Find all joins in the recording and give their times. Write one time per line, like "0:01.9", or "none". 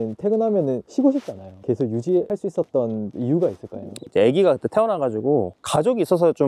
0:00.9
0:02.3

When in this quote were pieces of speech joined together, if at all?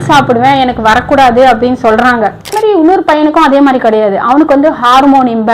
0:02.5

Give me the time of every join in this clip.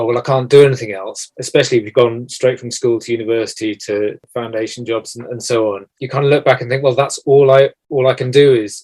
0:01.2
0:04.2
0:05.9
0:07.8

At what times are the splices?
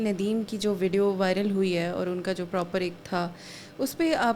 none

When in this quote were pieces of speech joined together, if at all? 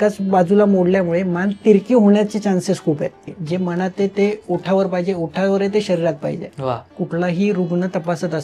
0:03.4
0:06.9

